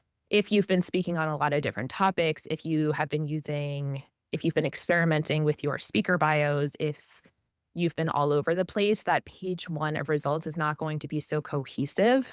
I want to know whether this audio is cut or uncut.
uncut